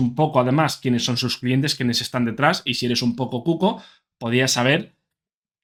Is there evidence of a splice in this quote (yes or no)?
no